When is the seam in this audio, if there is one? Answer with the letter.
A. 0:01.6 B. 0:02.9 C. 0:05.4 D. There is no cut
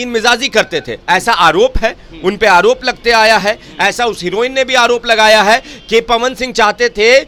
D